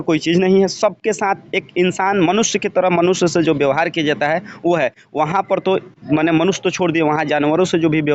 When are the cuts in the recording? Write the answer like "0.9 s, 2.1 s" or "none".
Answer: none